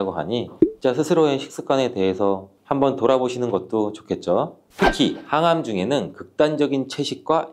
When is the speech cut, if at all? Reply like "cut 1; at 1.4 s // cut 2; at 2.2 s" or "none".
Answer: cut 1; at 4.6 s